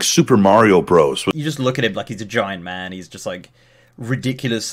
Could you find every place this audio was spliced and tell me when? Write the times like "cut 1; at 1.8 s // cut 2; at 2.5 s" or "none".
cut 1; at 1.2 s